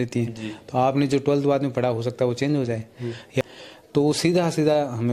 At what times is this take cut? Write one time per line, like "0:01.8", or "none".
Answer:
0:03.4